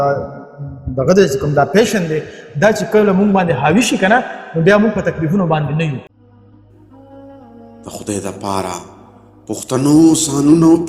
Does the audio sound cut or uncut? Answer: cut